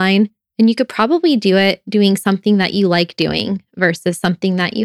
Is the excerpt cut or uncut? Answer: uncut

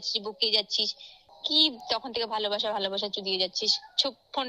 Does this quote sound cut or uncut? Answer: cut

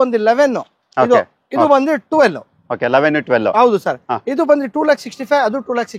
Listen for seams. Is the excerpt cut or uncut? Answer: uncut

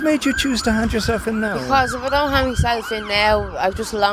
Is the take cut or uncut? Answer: uncut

